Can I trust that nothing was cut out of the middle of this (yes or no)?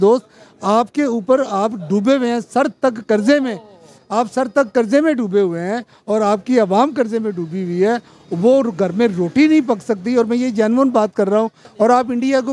no